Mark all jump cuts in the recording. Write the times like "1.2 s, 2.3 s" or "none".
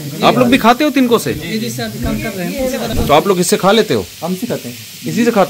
2.9 s